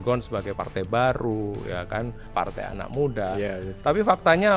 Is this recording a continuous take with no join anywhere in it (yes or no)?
no